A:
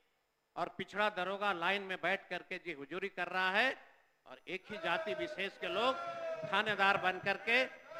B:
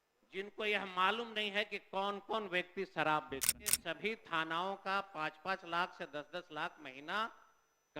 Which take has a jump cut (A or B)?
B